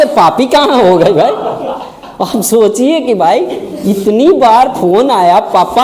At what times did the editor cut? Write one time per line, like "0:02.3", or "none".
none